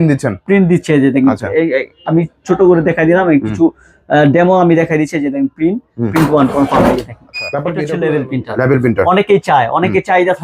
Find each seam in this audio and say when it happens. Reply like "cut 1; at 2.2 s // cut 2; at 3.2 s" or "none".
cut 1; at 7.8 s